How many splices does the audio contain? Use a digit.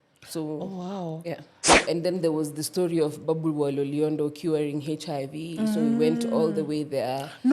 1